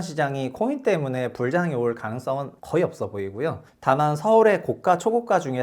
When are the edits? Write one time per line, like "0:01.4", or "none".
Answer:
0:02.6
0:03.7